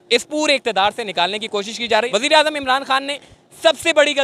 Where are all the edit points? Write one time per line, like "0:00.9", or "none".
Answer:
0:02.1